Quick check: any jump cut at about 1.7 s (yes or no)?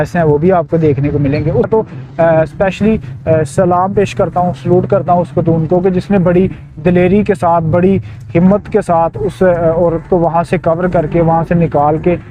yes